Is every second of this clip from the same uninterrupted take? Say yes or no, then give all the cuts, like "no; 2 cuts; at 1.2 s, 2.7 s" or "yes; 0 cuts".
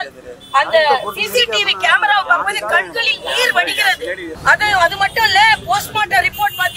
no; 1 cut; at 4.3 s